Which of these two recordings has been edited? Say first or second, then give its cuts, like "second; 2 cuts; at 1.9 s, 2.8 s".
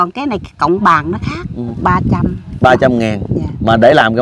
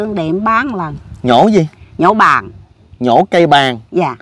first; 1 cut; at 1.7 s